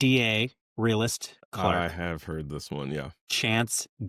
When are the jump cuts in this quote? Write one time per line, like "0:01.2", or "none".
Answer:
none